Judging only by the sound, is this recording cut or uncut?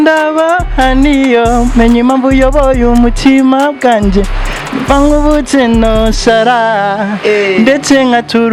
uncut